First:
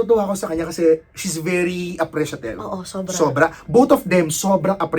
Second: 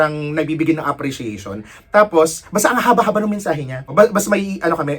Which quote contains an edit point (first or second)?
second